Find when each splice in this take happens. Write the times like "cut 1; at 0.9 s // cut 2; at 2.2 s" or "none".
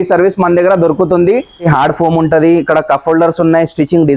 cut 1; at 1.7 s

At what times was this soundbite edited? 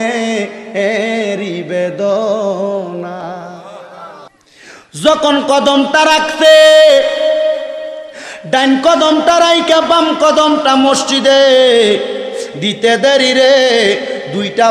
cut 1; at 4.3 s

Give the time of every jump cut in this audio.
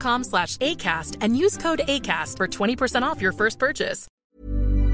cut 1; at 4.0 s

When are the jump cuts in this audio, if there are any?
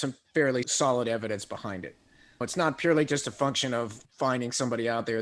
cut 1; at 4.0 s

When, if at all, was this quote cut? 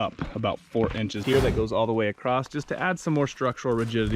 cut 1; at 1.2 s

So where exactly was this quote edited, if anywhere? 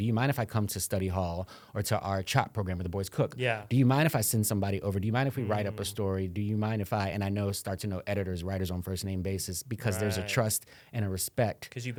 none

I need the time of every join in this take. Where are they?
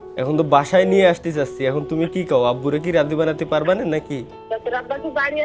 cut 1; at 4.4 s

